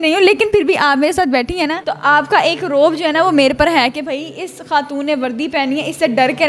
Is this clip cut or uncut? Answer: uncut